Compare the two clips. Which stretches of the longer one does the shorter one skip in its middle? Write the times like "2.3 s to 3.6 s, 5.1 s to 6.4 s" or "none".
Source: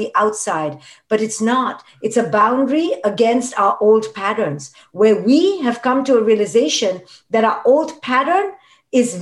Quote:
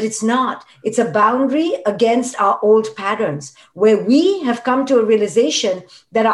none